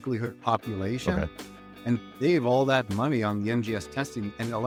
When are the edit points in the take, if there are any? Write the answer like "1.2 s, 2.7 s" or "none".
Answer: none

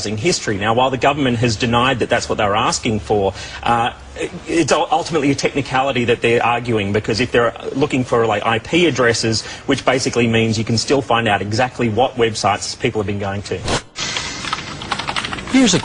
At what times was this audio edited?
8.4 s

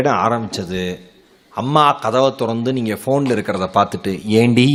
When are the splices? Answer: none

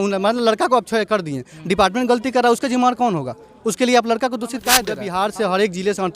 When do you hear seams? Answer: 5.0 s

